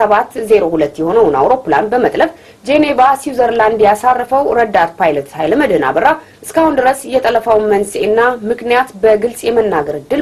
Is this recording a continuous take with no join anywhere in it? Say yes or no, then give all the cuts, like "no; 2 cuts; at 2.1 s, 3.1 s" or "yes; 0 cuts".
yes; 0 cuts